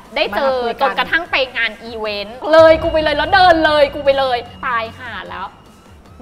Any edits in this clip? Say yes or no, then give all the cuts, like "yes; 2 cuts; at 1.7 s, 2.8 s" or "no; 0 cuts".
yes; 1 cut; at 2.4 s